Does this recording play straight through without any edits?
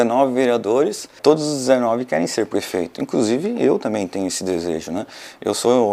no; 1 cut; at 1.2 s

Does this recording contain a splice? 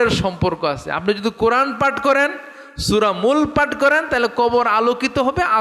no; 0 cuts

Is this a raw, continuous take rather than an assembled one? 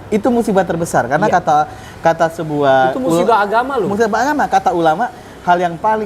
yes; 0 cuts

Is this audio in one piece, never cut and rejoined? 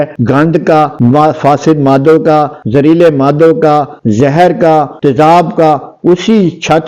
yes; 0 cuts

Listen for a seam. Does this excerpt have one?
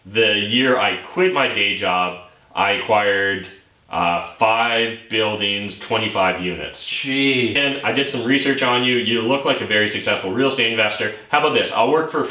yes; 1 cut; at 7.6 s

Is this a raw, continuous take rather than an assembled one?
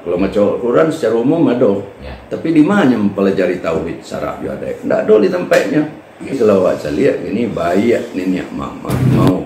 no; 1 cut; at 6.3 s

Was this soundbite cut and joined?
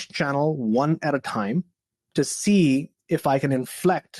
no; 0 cuts

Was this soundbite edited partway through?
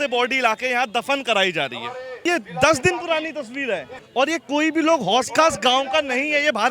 yes; 2 cuts; at 2.2 s, 4.0 s

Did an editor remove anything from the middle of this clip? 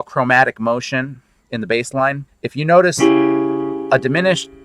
yes; 1 cut; at 2.2 s

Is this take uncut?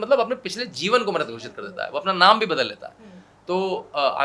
yes; 0 cuts

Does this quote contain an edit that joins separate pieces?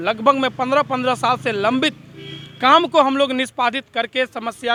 no; 0 cuts

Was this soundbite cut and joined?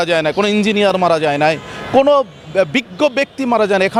no; 0 cuts

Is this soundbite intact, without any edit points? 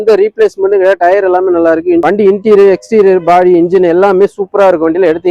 yes; 0 cuts

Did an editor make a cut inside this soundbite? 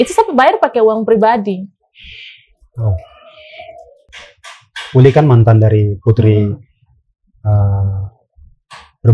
yes; 1 cut; at 4.1 s

